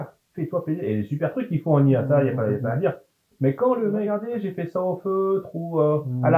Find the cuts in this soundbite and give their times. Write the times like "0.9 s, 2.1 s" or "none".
4.1 s